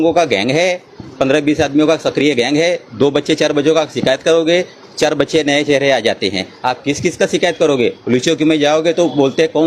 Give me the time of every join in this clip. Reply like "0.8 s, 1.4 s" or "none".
none